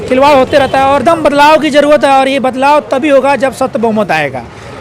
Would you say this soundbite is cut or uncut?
cut